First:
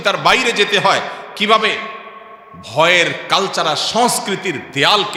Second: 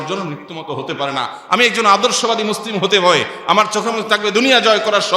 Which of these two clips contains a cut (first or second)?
second